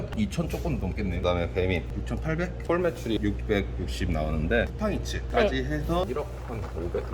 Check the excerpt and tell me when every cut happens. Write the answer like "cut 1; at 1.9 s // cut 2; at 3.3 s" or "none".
cut 1; at 1.2 s // cut 2; at 2.6 s // cut 3; at 4.7 s